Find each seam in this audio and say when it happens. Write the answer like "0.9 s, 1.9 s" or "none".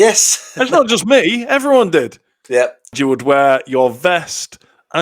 none